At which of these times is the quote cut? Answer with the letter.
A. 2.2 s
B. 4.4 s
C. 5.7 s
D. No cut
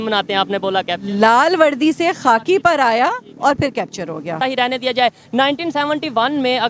B